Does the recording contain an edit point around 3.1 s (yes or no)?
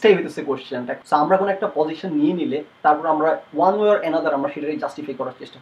no